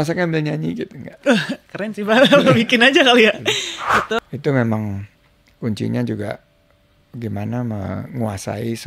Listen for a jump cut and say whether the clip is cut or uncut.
cut